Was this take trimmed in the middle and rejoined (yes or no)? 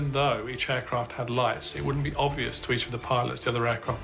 no